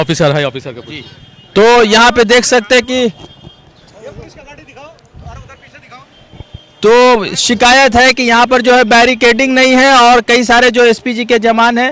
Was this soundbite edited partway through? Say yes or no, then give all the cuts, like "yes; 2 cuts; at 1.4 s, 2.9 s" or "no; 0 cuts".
no; 0 cuts